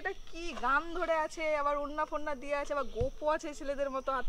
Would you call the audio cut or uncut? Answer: uncut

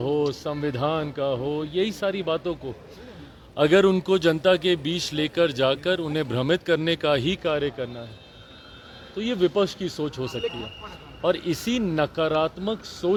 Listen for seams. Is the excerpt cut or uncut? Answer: uncut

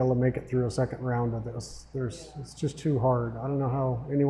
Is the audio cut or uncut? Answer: uncut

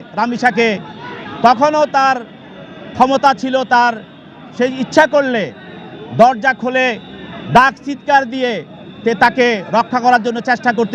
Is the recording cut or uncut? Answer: uncut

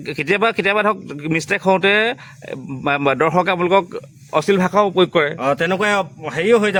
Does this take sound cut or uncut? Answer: uncut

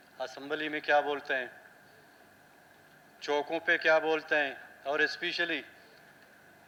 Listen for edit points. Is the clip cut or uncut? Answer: uncut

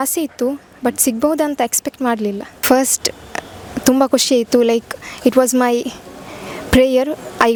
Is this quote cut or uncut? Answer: uncut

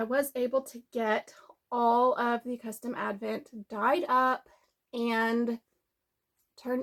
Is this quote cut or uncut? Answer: uncut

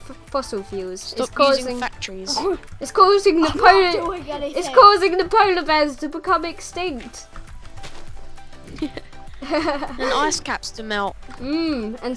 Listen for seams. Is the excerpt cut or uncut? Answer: uncut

